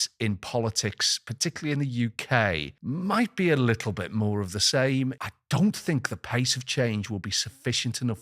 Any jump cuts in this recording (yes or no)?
yes